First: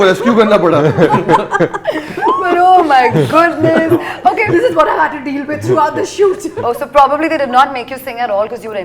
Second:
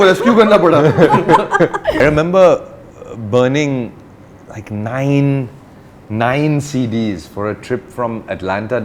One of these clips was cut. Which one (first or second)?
second